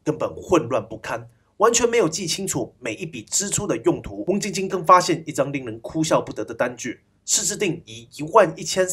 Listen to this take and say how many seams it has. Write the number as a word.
one